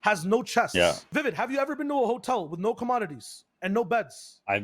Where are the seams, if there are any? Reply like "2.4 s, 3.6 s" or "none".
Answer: 1.0 s